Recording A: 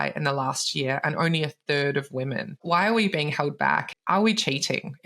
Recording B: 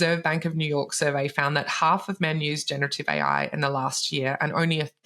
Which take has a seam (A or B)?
A